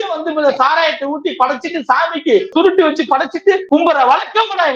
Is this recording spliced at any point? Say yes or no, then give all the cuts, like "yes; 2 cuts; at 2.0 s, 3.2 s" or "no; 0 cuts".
yes; 2 cuts; at 2.5 s, 3.6 s